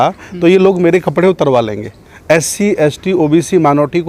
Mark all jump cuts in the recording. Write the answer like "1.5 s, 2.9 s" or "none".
none